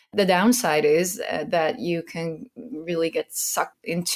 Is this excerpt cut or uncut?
uncut